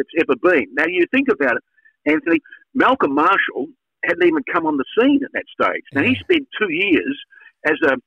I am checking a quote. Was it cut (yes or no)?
no